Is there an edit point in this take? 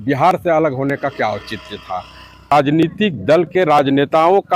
yes; 1 cut; at 2.5 s

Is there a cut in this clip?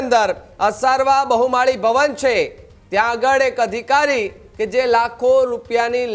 no; 0 cuts

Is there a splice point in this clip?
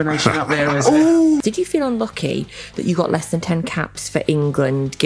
yes; 1 cut; at 1.4 s

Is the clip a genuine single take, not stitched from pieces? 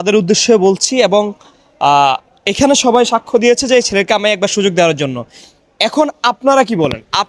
yes; 0 cuts

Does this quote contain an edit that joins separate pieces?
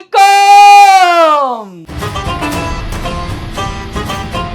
yes; 1 cut; at 1.8 s

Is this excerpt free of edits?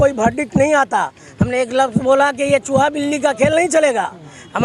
yes; 0 cuts

